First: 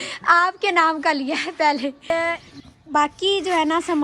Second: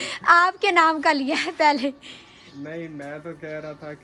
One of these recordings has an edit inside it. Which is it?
first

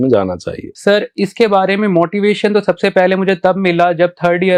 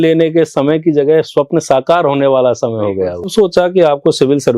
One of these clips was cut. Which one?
second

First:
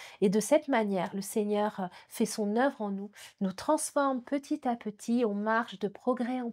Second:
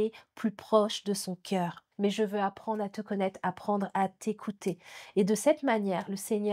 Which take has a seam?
second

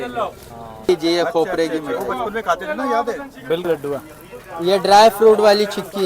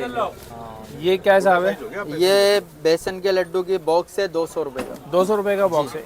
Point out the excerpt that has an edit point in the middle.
first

